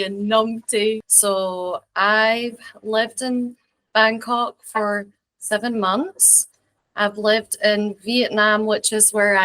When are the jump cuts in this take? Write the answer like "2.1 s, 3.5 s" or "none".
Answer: 1.1 s